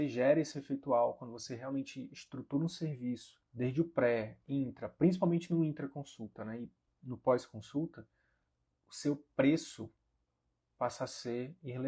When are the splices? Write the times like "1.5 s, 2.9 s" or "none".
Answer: 3.4 s